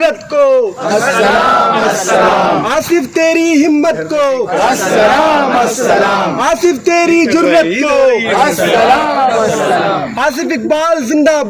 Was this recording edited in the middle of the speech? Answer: no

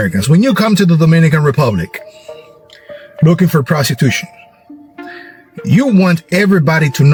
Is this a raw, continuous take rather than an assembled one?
yes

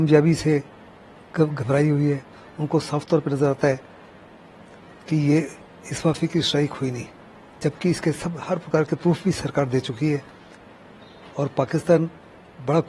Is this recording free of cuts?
yes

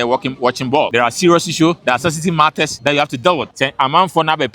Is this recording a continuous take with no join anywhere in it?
no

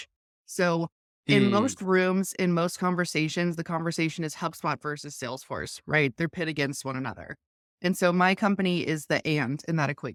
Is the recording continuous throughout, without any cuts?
yes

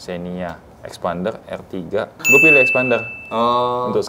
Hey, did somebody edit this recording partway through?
no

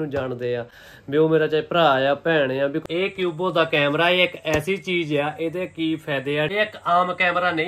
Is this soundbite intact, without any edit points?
no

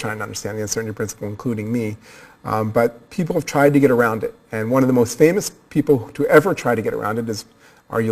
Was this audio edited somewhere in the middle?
no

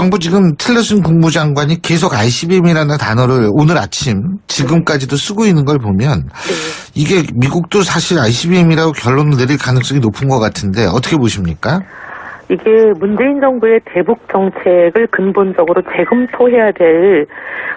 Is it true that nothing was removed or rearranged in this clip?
yes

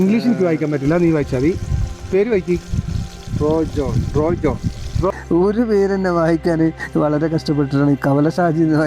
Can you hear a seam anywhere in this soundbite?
yes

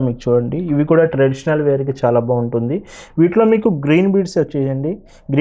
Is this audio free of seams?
yes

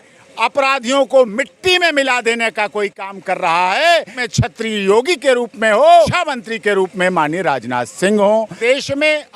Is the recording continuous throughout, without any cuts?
no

